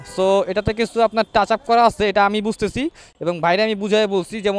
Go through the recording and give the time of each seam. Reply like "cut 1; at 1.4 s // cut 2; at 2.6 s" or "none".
none